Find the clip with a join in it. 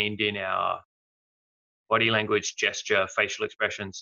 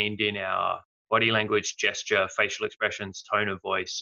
second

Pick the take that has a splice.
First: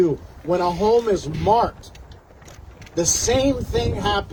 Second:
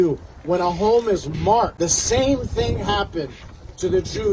second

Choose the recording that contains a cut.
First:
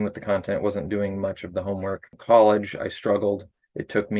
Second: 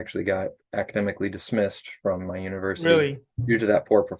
first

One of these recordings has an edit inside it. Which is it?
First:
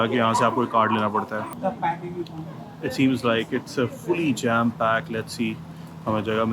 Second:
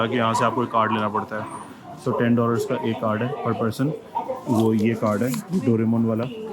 first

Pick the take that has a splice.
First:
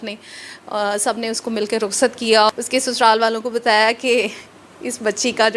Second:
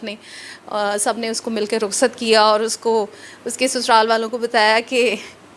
first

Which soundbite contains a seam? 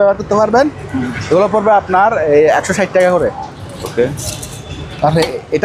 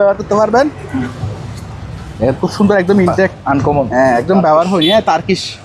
second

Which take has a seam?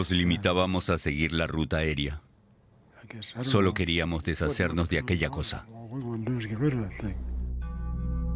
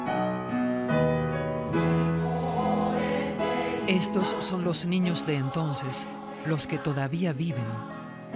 second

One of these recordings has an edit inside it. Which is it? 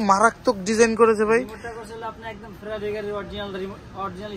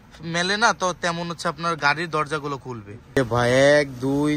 second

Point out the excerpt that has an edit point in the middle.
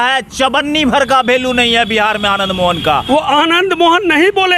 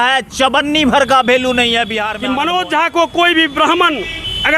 second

